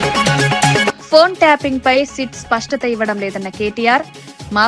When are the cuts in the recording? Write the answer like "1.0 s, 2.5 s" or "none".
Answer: 1.0 s